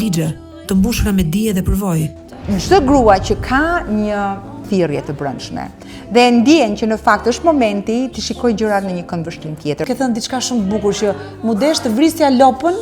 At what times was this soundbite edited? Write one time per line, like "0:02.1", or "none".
0:02.3
0:04.6
0:09.8